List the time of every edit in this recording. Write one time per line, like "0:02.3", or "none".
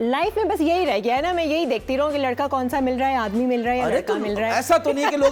none